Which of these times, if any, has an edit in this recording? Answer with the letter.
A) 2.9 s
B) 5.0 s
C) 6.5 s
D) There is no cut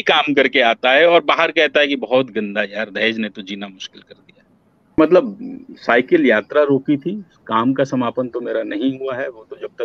B